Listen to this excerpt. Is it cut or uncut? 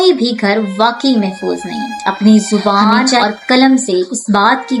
cut